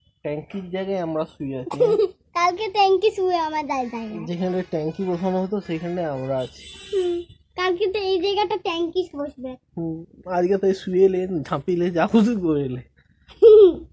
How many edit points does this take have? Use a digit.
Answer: 0